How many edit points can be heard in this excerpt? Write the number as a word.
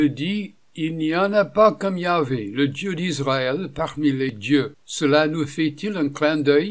one